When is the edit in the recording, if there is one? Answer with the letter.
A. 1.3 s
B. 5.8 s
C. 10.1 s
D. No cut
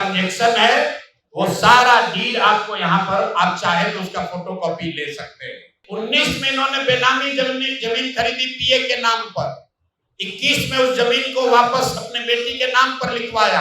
B